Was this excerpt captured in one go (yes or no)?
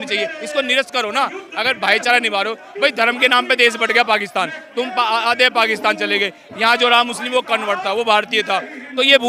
yes